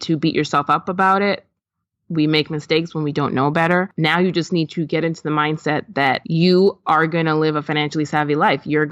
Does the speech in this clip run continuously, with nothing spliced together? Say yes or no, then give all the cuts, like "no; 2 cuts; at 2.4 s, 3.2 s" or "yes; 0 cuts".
no; 2 cuts; at 3.9 s, 6.2 s